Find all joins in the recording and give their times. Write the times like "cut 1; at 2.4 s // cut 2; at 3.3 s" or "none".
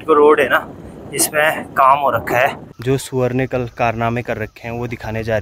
cut 1; at 2.7 s